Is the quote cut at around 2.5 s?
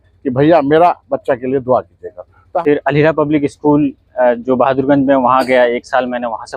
yes; 1 cut; at 2.5 s

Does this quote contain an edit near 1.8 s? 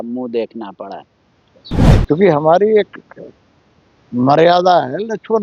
yes; 1 cut; at 1.8 s

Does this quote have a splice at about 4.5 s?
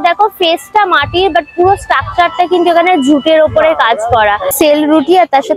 yes; 1 cut; at 4.5 s

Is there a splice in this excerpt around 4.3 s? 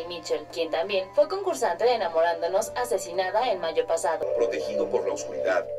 yes; 1 cut; at 4.3 s

